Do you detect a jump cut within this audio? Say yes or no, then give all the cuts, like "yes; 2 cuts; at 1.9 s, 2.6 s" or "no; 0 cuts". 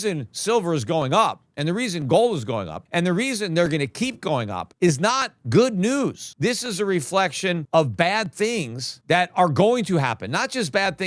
no; 0 cuts